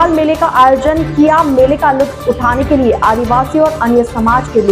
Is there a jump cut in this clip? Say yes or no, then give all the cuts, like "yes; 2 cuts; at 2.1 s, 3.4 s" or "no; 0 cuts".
no; 0 cuts